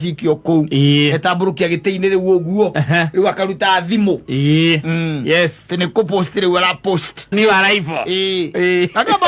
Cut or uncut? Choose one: cut